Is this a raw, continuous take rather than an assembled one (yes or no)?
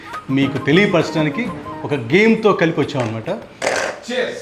no